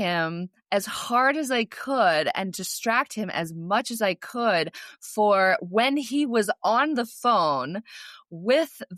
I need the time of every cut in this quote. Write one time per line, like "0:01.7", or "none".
none